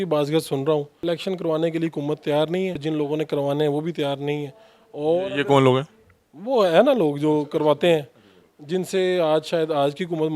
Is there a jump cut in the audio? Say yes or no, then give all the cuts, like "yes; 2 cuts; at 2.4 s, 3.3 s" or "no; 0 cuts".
yes; 2 cuts; at 0.9 s, 2.8 s